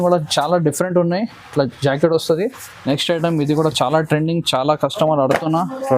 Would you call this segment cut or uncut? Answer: cut